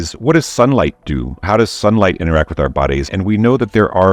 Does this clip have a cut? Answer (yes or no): no